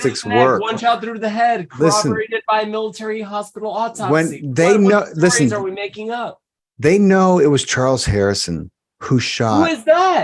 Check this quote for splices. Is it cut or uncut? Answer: uncut